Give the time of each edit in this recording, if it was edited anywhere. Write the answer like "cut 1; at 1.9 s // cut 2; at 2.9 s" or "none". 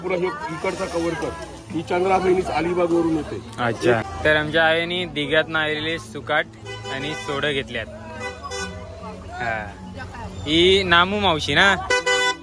cut 1; at 4.0 s